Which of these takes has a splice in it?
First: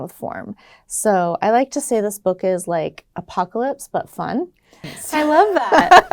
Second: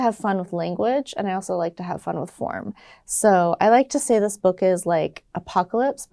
first; 1 cut; at 4.9 s

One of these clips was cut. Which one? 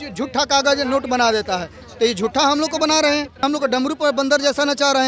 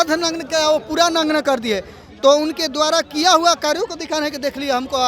first; 1 cut; at 3.4 s

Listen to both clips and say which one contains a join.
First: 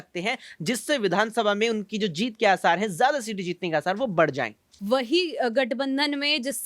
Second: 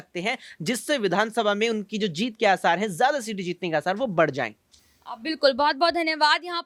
first; 1 cut; at 4.7 s

